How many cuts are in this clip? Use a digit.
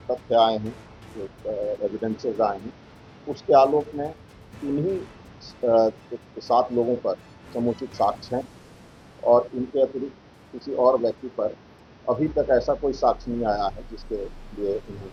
0